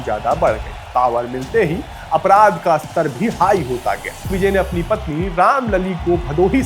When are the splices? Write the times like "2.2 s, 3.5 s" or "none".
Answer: 4.3 s